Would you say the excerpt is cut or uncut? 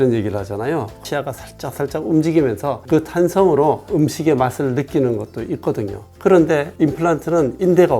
cut